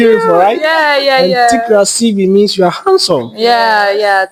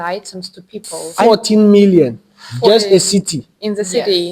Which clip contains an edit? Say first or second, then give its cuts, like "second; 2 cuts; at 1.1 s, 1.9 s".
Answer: second; 1 cut; at 1.2 s